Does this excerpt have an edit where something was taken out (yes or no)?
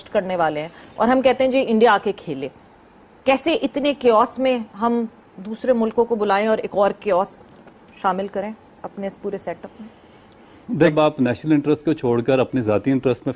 no